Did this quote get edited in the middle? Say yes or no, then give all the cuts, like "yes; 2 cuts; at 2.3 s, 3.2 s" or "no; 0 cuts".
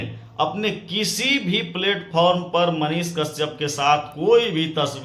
no; 0 cuts